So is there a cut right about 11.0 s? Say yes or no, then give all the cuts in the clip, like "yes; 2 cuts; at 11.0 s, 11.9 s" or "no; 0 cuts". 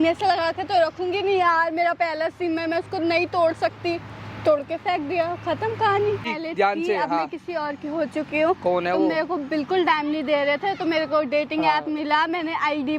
no; 1 cut; at 6.3 s